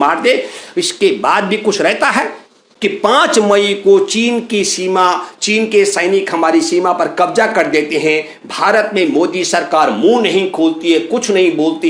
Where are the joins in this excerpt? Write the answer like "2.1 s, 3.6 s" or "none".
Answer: none